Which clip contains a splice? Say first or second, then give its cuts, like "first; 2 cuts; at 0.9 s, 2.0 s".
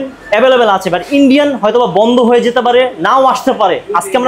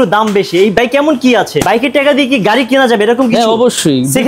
second; 1 cut; at 1.6 s